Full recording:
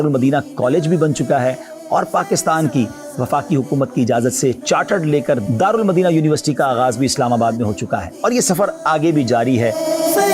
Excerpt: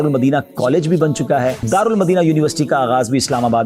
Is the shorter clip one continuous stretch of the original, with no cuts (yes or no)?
no